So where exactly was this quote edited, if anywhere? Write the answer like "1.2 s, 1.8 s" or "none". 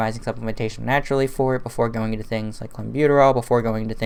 none